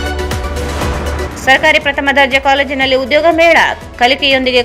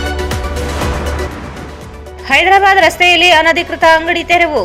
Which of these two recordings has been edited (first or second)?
second